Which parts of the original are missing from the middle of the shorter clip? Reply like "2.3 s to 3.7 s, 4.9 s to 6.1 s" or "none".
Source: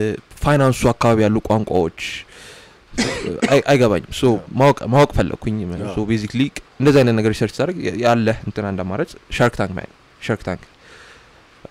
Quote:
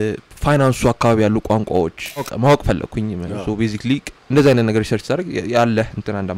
2.3 s to 4.8 s